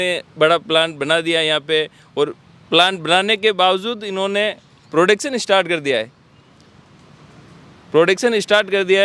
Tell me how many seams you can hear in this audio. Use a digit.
0